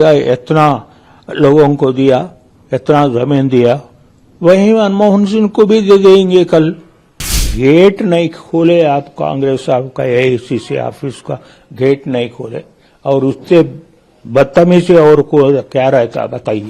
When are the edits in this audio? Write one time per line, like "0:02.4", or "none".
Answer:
0:07.4